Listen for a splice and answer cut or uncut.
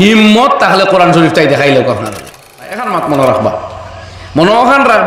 cut